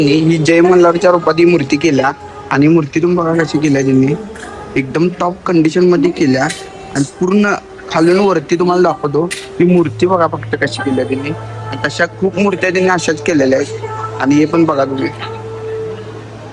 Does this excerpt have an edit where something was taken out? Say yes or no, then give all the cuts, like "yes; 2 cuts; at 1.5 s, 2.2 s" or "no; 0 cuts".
no; 0 cuts